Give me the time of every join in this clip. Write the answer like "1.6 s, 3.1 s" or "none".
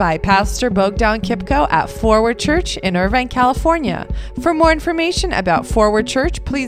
none